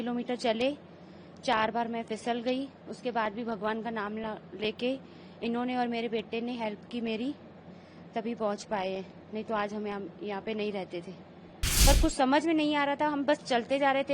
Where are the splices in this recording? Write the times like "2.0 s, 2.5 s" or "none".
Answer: 11.6 s